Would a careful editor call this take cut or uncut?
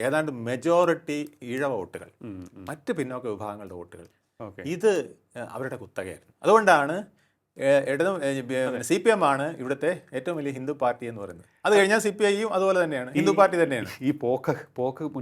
uncut